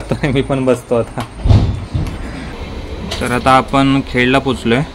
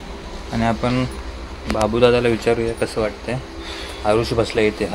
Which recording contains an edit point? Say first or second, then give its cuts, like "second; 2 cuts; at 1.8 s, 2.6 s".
first; 1 cut; at 2.8 s